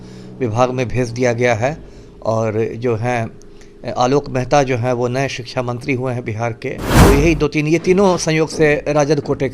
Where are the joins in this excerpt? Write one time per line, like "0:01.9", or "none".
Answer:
0:06.9

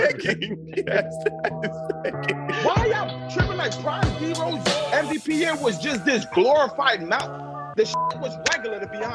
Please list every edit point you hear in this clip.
0:02.6

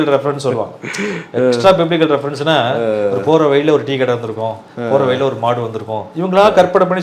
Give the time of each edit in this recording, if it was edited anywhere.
none

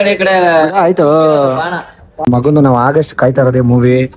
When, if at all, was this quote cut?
0:02.2

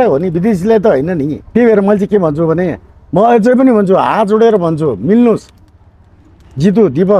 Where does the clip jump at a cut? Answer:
0:01.4

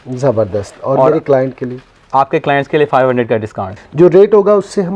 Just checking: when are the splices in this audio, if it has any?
0:03.7

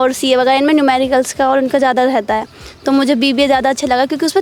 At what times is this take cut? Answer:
none

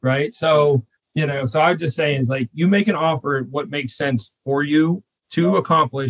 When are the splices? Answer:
0:01.0

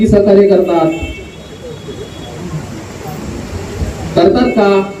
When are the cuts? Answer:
none

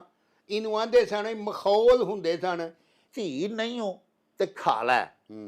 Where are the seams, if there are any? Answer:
0:03.0

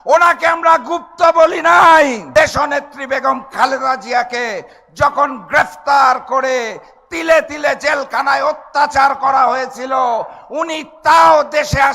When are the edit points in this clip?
0:02.2

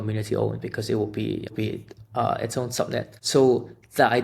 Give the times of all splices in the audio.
0:01.5
0:03.2

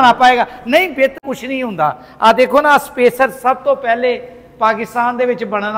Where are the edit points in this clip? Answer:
0:01.1

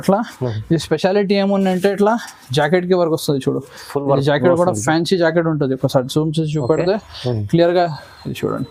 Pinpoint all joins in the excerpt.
none

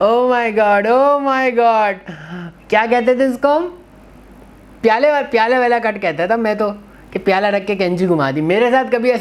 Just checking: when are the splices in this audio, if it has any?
none

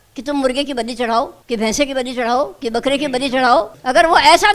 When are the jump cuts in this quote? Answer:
0:01.4
0:03.7

